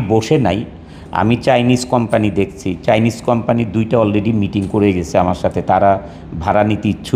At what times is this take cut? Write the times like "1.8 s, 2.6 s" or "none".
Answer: none